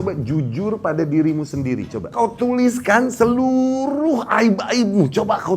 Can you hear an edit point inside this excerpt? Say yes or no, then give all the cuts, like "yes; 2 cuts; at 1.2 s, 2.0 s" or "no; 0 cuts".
yes; 1 cut; at 2.1 s